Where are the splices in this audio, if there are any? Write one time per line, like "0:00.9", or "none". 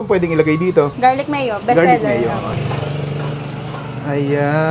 0:00.9
0:02.5